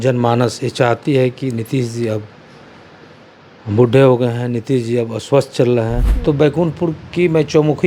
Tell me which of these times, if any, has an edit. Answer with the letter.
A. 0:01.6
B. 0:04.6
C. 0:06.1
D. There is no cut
C